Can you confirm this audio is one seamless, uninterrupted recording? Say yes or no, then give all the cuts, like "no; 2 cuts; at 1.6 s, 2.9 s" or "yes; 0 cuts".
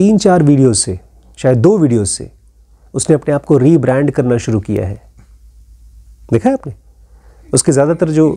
yes; 0 cuts